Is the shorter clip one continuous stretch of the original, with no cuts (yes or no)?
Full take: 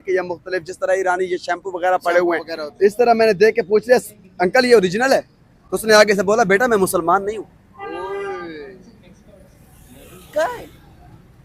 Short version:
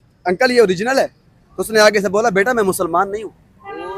yes